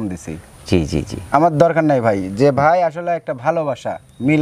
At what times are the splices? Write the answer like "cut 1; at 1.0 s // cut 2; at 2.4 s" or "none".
none